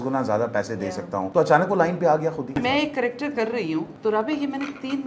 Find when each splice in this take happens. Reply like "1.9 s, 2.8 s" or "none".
1.3 s, 2.5 s, 3.9 s